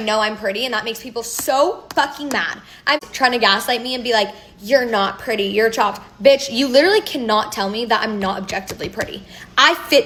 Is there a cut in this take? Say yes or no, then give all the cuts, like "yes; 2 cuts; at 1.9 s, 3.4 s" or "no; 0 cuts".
no; 0 cuts